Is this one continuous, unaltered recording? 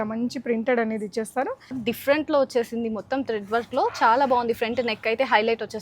no; 1 cut; at 1.8 s

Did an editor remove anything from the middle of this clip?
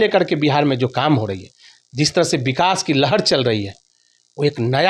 no; 0 cuts

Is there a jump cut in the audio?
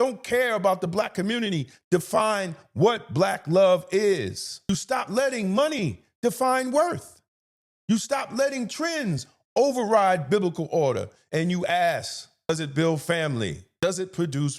yes; 3 cuts; at 4.7 s, 12.5 s, 13.7 s

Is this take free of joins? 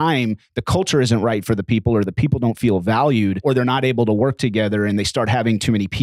no; 1 cut; at 3.4 s

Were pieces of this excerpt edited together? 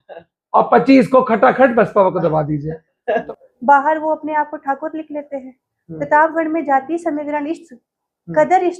yes; 1 cut; at 3.2 s

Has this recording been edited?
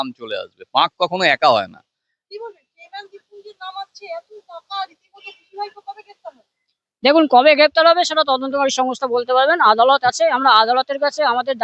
no; 0 cuts

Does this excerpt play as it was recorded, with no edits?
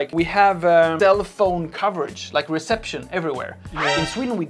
yes; 0 cuts

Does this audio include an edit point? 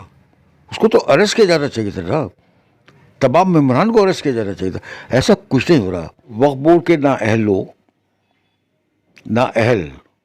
yes; 1 cut; at 6.3 s

